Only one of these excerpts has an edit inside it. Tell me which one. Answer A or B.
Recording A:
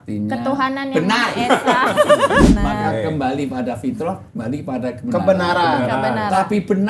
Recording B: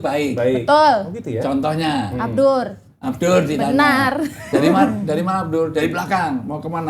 A